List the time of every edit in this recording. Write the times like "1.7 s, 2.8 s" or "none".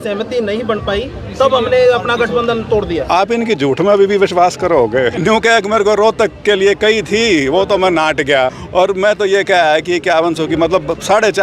5.2 s, 8.6 s